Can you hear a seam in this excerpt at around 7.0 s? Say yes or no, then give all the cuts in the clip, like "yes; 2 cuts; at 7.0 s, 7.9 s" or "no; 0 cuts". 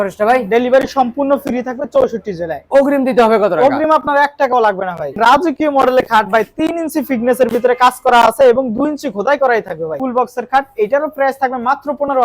no; 2 cuts; at 5.1 s, 10.0 s